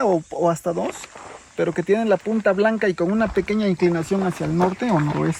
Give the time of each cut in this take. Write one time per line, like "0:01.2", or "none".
none